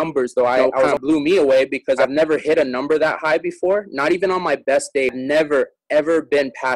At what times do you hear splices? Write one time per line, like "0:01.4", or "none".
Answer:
0:00.9
0:02.0
0:05.1